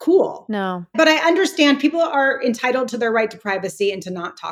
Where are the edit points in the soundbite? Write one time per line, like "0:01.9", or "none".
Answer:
0:00.9